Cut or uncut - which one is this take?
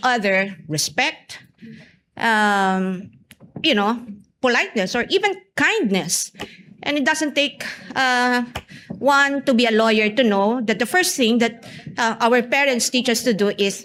uncut